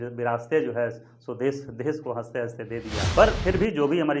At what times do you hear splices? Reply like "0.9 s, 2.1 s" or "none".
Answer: 3.1 s